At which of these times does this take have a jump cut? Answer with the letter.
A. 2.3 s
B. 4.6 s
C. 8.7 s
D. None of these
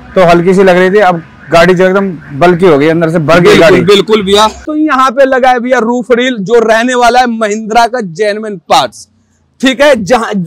B